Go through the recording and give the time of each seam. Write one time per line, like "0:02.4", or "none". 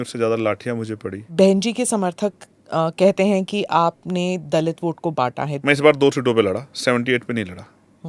0:01.2
0:05.5